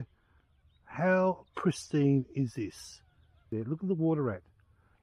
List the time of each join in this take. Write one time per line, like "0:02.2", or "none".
0:03.5